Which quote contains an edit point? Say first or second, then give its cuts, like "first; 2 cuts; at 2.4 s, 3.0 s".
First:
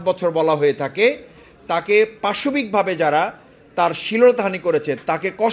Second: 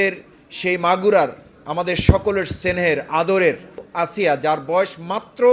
second; 1 cut; at 3.9 s